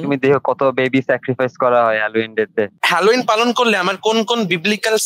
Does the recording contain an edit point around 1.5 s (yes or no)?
no